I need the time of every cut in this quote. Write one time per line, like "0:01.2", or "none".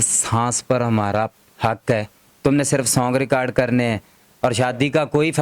0:02.3